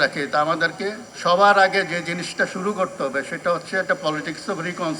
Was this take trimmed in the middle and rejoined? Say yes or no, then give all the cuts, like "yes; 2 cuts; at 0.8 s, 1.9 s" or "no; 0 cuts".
yes; 1 cut; at 1.1 s